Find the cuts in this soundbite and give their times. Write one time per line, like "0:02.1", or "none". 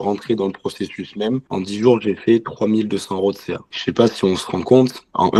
none